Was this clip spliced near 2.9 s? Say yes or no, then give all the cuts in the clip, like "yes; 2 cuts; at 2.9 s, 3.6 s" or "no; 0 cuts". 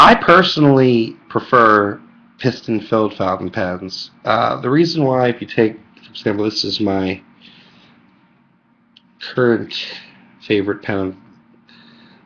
yes; 1 cut; at 2.9 s